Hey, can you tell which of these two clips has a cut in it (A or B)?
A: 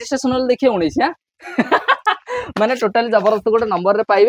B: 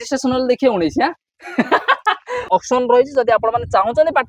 B